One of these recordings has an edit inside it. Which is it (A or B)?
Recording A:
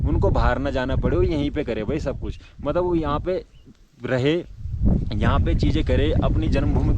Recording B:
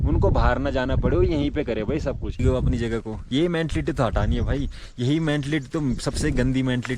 B